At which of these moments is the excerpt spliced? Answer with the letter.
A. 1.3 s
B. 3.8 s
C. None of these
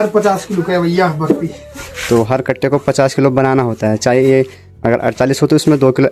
C